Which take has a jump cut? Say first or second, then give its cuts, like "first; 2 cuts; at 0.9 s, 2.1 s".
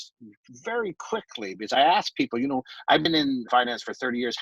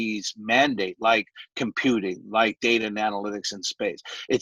first; 1 cut; at 3.5 s